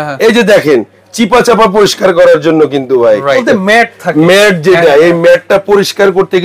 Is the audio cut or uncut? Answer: cut